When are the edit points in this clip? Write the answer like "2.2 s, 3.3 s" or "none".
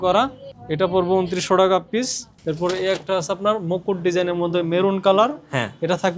2.3 s